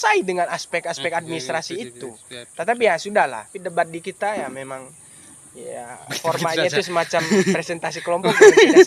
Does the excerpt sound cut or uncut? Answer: cut